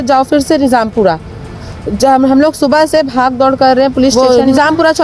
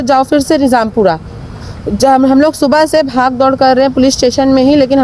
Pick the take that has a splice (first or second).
first